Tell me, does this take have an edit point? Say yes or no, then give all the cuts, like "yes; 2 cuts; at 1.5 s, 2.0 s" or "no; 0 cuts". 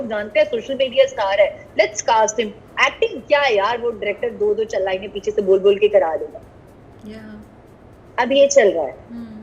no; 0 cuts